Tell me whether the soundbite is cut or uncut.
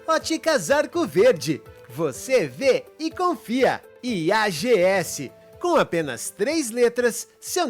uncut